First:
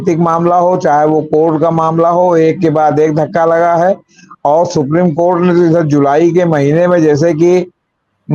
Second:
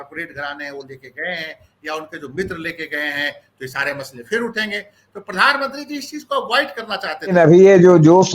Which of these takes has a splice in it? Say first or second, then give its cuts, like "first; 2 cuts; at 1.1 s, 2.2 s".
second; 1 cut; at 7.3 s